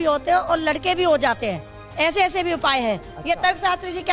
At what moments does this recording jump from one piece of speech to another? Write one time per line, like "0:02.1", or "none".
none